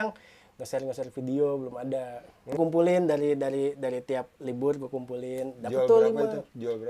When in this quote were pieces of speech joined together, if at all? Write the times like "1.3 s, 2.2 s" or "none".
2.6 s